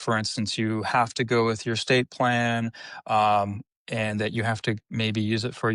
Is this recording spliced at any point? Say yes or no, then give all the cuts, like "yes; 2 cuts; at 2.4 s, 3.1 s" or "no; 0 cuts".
no; 0 cuts